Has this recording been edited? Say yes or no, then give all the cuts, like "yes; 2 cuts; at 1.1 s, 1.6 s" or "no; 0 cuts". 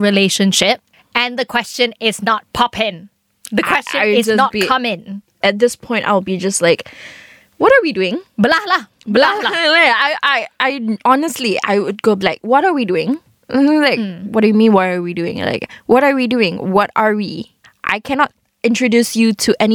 no; 0 cuts